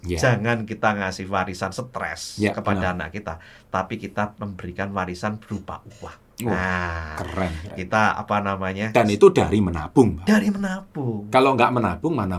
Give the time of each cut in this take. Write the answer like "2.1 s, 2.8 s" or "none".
none